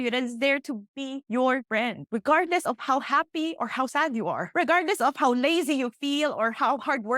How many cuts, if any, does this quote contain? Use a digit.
1